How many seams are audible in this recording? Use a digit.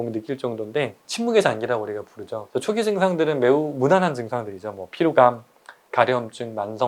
2